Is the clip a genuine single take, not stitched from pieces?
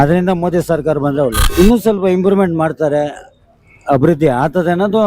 no; 1 cut; at 1.4 s

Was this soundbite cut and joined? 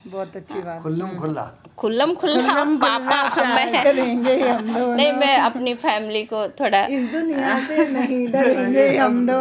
no; 0 cuts

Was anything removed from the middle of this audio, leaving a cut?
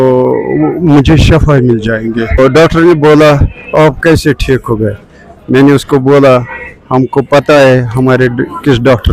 yes; 1 cut; at 2.4 s

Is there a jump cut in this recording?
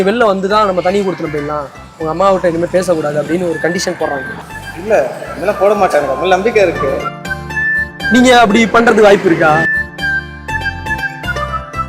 yes; 1 cut; at 4.4 s

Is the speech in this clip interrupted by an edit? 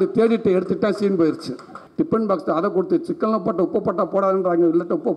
yes; 1 cut; at 1.8 s

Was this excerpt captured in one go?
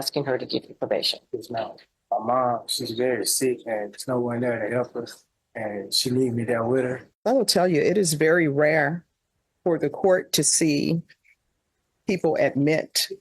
no; 2 cuts; at 1.9 s, 7.1 s

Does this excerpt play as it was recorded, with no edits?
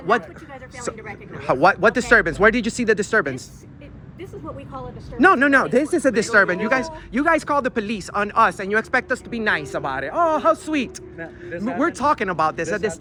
yes; 0 cuts

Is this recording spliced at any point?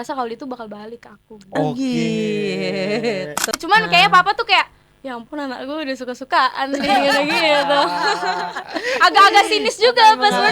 yes; 1 cut; at 3.5 s

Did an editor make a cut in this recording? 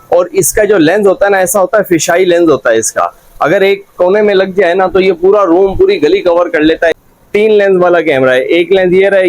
yes; 1 cut; at 6.9 s

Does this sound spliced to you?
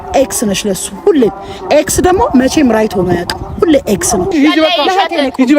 yes; 1 cut; at 4.3 s

